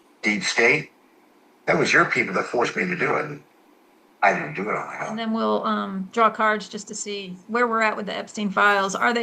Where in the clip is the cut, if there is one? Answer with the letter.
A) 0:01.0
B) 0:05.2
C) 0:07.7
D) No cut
B